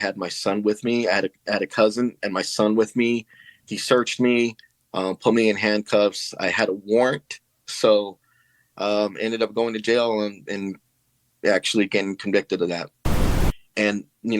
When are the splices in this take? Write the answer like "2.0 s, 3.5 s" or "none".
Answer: 13.4 s